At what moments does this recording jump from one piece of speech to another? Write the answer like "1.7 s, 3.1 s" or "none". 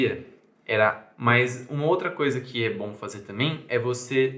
1.1 s

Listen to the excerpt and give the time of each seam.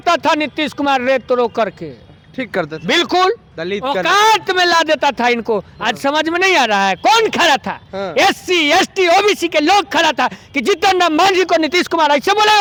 none

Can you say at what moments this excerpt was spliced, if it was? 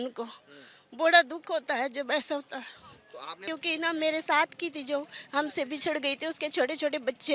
3.5 s

